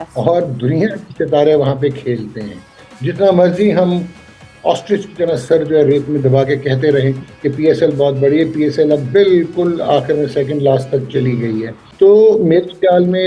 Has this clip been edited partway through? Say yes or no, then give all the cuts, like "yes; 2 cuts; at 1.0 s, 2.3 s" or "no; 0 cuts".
no; 0 cuts